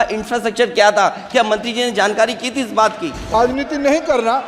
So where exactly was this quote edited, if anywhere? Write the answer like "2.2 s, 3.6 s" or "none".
3.3 s